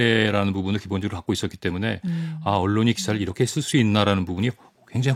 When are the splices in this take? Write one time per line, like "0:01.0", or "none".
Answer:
none